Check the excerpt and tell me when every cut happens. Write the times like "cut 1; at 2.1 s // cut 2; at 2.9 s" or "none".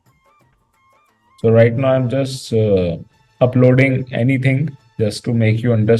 cut 1; at 1.4 s